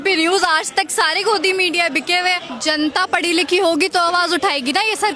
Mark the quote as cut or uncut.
cut